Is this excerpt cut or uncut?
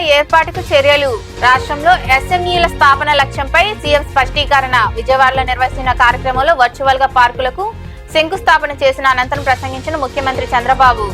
uncut